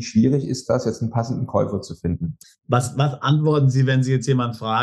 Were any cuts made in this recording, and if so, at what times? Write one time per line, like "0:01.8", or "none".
0:02.3